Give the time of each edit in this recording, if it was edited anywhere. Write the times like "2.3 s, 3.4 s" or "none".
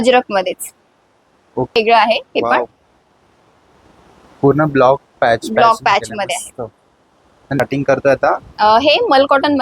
1.8 s, 7.6 s